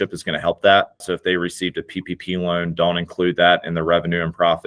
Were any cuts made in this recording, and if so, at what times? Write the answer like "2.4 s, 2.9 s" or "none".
1.0 s